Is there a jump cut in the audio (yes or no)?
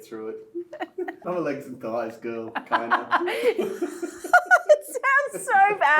yes